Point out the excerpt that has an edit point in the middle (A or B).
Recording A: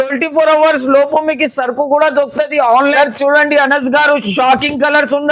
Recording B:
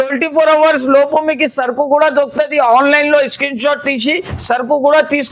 A